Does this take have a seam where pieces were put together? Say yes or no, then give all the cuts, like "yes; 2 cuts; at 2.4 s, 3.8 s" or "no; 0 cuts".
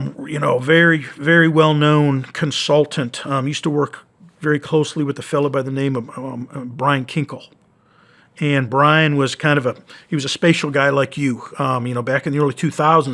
no; 0 cuts